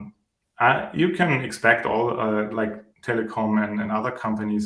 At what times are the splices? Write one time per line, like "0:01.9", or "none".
none